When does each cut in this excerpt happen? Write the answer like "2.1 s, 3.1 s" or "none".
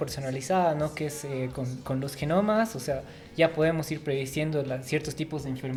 none